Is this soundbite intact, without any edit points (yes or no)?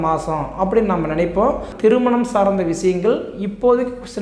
no